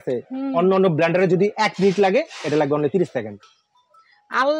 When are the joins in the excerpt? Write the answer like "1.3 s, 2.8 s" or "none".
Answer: 3.4 s